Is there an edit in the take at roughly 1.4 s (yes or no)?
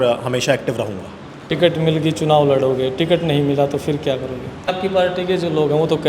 yes